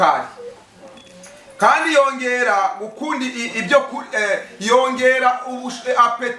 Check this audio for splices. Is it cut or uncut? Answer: uncut